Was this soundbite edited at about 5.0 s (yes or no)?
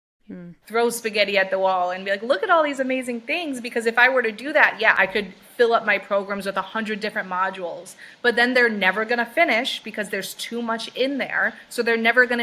yes